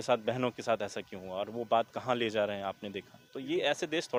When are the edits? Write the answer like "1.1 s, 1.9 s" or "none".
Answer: none